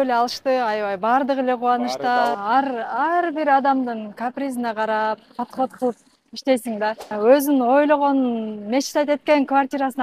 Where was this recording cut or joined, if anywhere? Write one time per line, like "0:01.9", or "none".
0:02.4
0:07.1